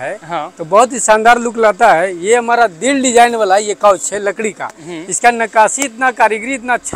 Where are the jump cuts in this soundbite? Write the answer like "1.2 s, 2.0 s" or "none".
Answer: none